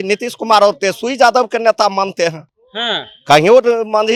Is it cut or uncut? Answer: uncut